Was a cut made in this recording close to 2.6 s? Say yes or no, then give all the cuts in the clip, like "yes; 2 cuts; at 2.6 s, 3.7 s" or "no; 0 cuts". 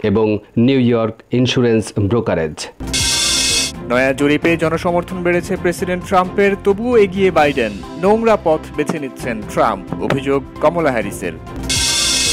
yes; 1 cut; at 2.6 s